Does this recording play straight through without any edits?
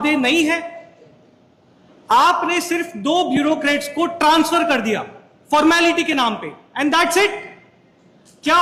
yes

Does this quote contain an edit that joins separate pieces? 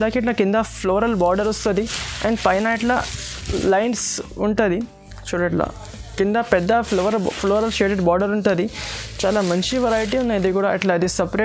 no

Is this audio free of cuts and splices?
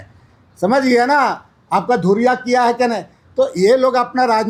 yes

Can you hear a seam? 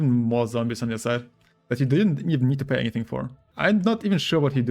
yes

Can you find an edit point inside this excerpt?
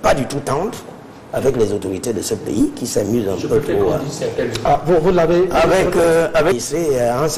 no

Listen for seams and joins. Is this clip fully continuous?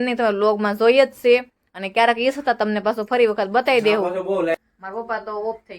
no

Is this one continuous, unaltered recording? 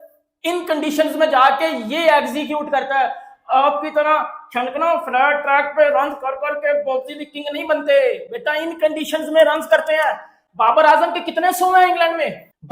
yes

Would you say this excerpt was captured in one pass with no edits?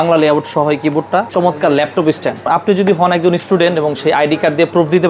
no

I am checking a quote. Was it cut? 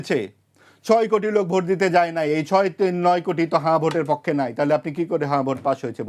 no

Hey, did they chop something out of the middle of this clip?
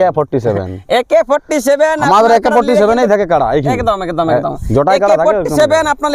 no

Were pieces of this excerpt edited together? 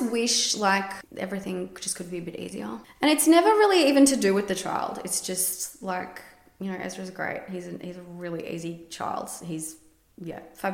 no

